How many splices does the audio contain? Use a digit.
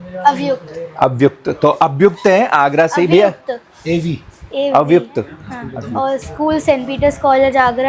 1